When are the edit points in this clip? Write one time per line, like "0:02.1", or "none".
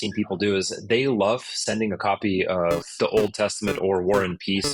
0:02.9